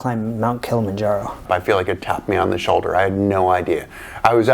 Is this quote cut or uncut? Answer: cut